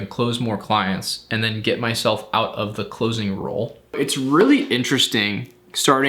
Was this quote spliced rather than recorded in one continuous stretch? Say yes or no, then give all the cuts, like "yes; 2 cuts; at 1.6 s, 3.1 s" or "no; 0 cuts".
yes; 1 cut; at 4.0 s